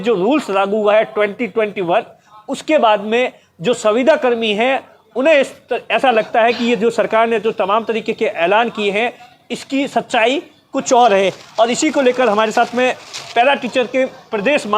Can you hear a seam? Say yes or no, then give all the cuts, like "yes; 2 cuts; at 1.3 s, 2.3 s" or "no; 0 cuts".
no; 0 cuts